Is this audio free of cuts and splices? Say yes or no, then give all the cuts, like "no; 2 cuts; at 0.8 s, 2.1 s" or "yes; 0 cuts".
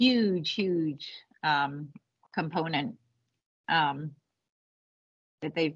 yes; 0 cuts